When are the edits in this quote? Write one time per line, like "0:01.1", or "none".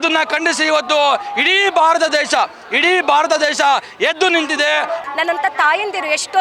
0:05.0

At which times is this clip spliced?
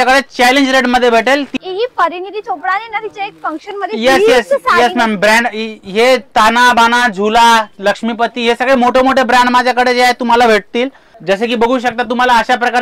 0:01.5
0:11.1

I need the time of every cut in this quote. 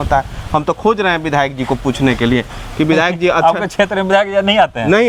none

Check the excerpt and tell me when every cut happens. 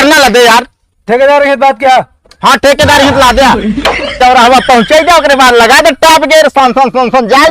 0:04.1

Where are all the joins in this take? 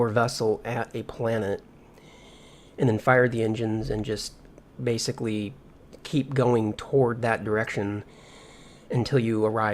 0:04.2

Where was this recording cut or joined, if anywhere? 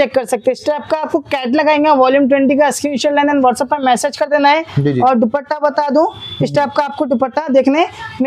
none

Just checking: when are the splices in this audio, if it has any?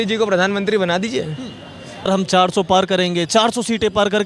0:02.1

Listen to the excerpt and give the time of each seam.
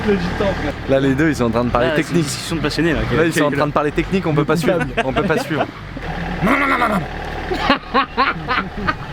0:06.0

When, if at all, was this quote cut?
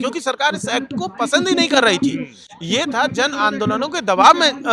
none

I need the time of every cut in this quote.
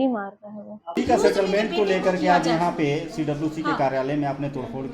0:00.9

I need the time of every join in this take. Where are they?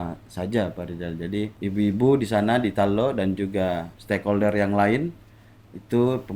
0:01.5
0:03.9

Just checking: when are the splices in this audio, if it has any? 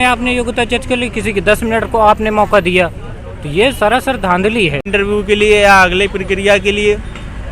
0:04.9

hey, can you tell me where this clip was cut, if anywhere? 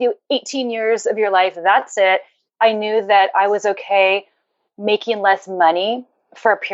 none

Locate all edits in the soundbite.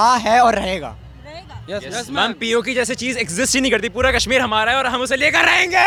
none

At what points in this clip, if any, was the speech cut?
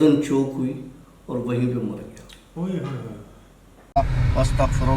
0:03.8

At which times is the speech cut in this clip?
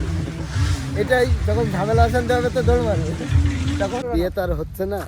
0:04.0

